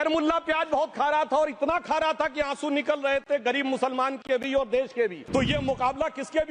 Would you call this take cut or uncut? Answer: cut